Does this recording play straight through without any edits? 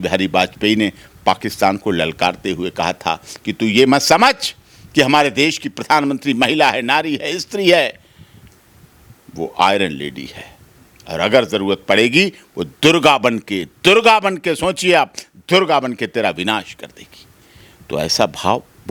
yes; 0 cuts

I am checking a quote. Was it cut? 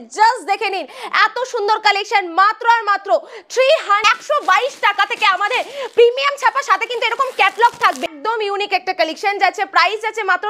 yes; 2 cuts; at 4.0 s, 8.1 s

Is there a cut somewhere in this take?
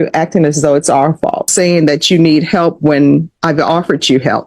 yes; 1 cut; at 1.5 s

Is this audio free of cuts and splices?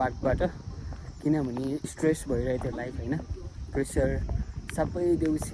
no; 1 cut; at 1.8 s

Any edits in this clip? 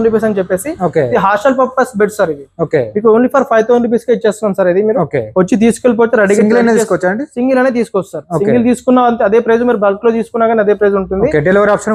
no; 0 cuts

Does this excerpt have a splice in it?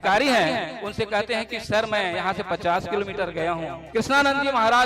yes; 1 cut; at 3.8 s

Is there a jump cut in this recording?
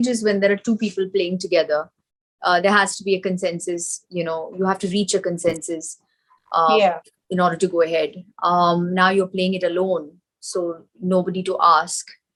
no; 0 cuts

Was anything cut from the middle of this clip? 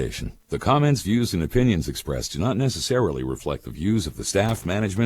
yes; 1 cut; at 2.4 s

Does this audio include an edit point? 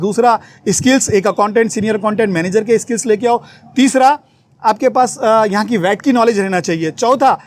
no; 0 cuts

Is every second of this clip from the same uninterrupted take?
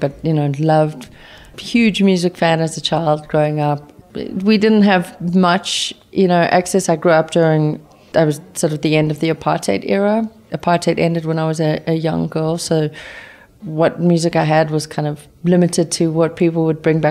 no; 3 cuts; at 1.5 s, 3.9 s, 7.8 s

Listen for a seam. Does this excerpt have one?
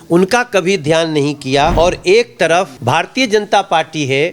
yes; 2 cuts; at 1.7 s, 2.7 s

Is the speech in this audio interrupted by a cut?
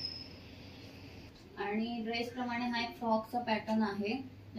no; 0 cuts

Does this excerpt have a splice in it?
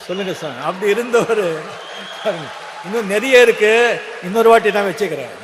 no; 0 cuts

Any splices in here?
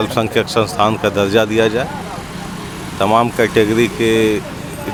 no; 0 cuts

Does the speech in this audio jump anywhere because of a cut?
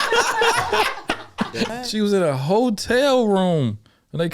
yes; 1 cut; at 1.7 s

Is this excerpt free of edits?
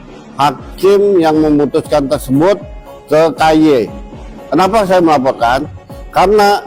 yes; 0 cuts

